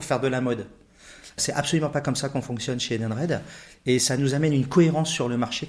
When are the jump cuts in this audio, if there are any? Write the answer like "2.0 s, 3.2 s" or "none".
1.3 s